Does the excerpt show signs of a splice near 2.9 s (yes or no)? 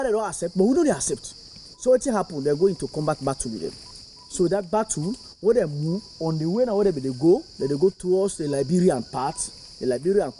yes